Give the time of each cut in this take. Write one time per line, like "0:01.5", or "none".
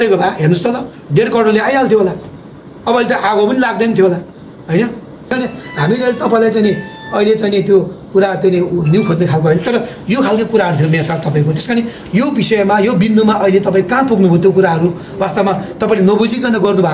0:05.3